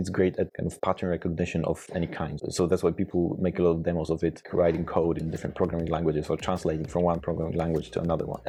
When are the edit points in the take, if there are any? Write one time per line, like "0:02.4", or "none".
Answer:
none